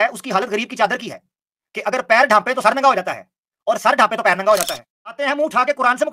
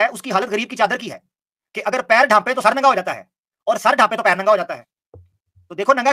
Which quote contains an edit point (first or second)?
first